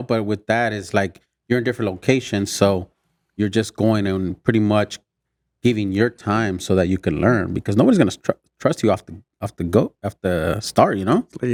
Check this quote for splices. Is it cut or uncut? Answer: uncut